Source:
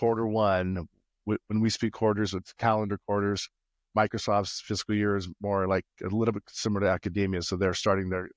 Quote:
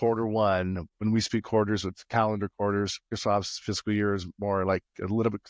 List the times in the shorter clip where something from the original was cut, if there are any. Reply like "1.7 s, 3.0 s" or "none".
1.0 s, 3.1 s